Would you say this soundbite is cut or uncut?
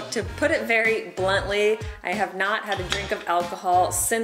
uncut